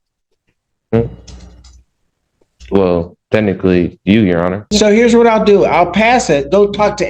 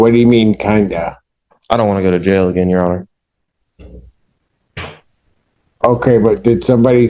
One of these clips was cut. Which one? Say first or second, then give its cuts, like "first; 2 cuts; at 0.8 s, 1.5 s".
first; 1 cut; at 4.7 s